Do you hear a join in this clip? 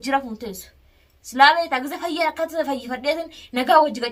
no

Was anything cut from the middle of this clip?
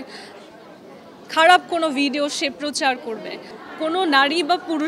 yes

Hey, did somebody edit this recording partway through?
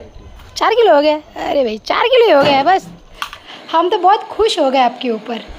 yes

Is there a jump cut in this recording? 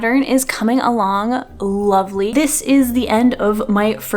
yes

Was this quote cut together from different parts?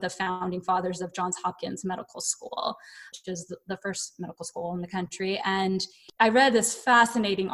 yes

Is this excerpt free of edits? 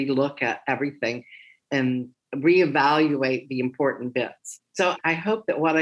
no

